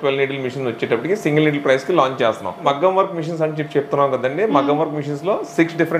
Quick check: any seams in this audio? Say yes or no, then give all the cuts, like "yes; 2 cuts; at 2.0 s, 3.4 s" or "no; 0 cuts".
yes; 1 cut; at 2.6 s